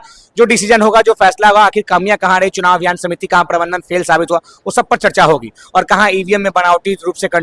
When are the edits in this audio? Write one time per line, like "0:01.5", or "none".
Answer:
none